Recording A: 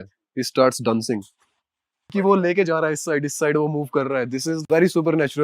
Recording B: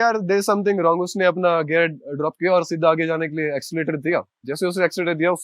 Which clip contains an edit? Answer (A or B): A